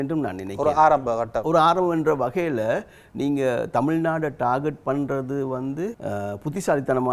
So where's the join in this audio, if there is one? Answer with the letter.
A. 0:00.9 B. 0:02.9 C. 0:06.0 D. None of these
C